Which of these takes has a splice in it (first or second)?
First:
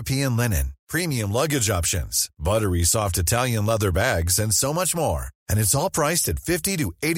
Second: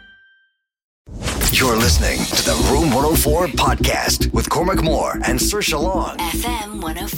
second